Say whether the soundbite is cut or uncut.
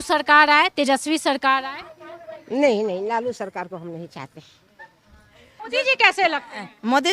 cut